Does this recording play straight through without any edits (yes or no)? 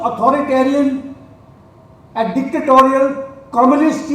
yes